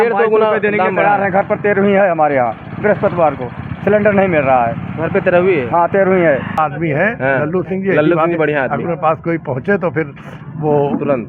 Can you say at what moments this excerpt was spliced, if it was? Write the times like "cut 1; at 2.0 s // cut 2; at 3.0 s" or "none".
cut 1; at 6.6 s